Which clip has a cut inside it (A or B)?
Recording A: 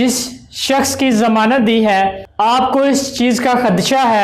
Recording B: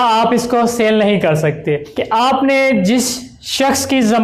B